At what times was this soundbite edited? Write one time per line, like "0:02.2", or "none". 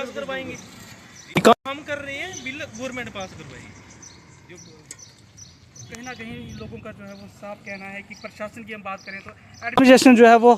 none

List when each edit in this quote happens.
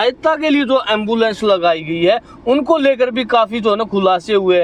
none

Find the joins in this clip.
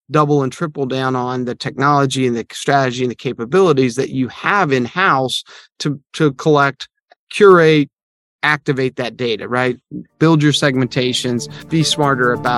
0:11.6

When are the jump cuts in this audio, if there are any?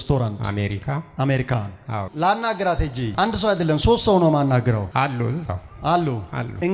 0:02.1

